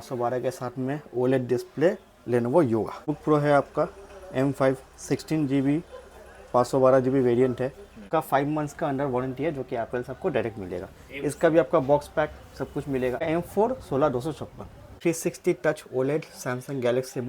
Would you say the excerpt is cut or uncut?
cut